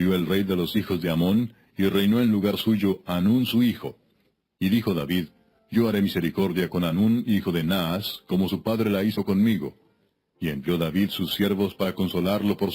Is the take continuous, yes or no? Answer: no